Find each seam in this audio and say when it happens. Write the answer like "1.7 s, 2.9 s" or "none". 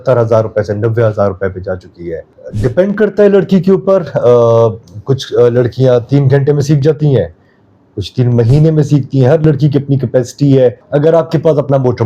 2.4 s, 10.8 s